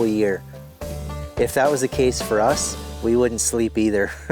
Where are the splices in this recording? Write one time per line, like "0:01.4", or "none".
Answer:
0:01.0